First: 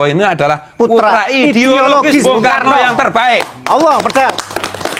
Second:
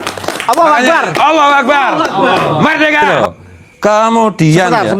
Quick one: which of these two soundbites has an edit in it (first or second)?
second